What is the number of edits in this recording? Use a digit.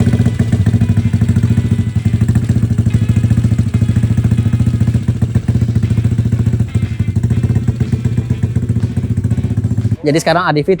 0